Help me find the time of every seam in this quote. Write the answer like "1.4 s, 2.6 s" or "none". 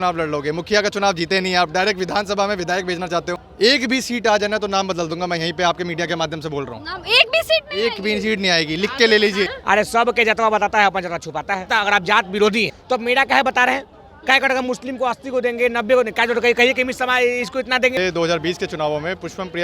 3.5 s, 9.6 s, 11.7 s, 12.8 s, 18.0 s